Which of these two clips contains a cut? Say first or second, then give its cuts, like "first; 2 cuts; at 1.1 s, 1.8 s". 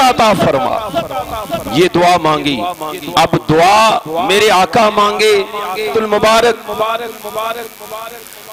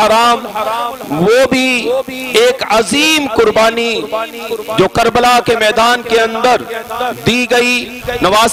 first; 1 cut; at 5.9 s